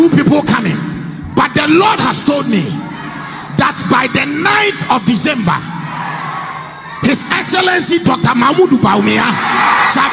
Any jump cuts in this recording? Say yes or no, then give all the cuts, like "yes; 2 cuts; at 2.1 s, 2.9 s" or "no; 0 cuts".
no; 0 cuts